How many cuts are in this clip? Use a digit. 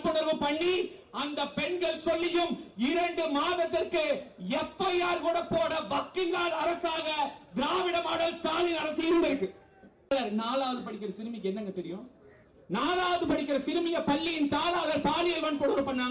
1